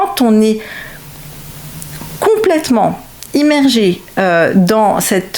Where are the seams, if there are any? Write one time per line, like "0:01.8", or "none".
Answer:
none